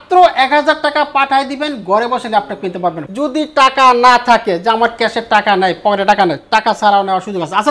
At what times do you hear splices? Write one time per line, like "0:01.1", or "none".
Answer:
0:03.0